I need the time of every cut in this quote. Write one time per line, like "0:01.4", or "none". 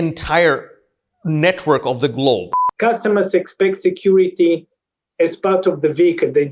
0:02.6